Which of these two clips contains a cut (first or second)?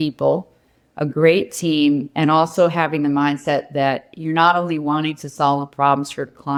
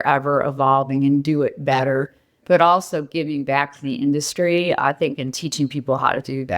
second